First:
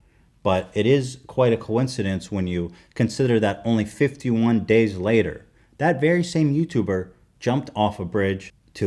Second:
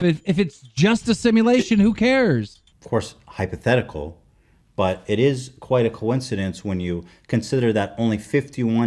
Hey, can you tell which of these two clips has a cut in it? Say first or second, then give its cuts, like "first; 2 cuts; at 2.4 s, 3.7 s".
second; 1 cut; at 2.6 s